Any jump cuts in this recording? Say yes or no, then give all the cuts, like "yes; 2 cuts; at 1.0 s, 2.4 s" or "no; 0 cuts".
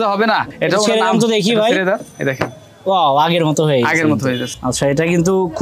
yes; 1 cut; at 4.5 s